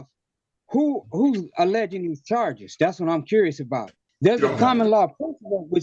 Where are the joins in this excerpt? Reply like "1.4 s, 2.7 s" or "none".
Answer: 4.0 s